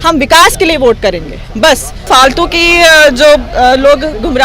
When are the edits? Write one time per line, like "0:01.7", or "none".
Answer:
0:02.0